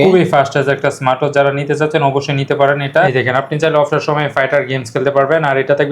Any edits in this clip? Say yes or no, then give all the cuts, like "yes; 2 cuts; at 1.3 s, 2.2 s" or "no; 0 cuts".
yes; 1 cut; at 3.1 s